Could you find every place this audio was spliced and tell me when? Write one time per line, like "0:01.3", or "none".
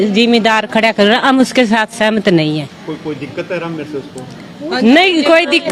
none